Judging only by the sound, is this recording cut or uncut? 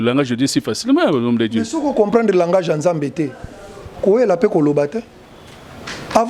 uncut